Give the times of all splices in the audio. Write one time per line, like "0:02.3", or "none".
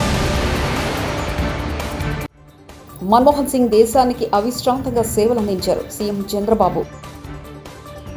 none